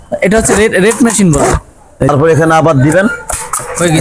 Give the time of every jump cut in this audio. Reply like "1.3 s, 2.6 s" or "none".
1.9 s